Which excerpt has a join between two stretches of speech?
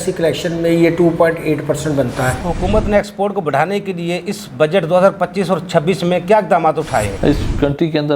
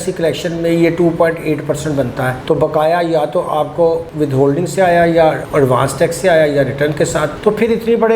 first; 2 cuts; at 2.4 s, 7.1 s

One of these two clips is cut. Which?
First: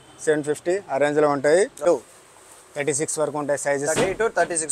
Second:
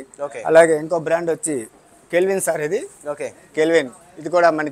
first; 1 cut; at 1.8 s

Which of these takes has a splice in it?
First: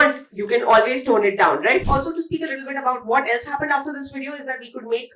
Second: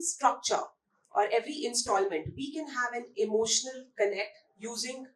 first; 1 cut; at 1.9 s

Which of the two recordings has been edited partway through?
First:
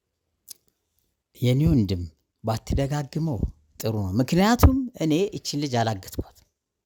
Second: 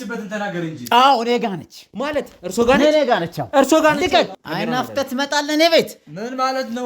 second; 1 cut; at 4.4 s

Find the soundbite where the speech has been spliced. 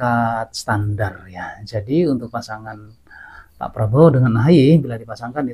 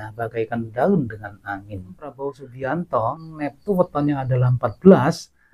second; 2 cuts; at 2.1 s, 3.2 s

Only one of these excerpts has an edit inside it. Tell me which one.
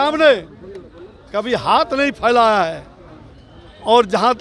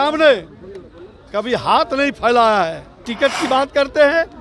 second; 1 cut; at 3.1 s

